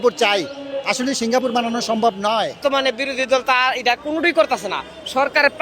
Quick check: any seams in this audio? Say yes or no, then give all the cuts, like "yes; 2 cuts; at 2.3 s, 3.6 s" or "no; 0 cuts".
yes; 1 cut; at 2.5 s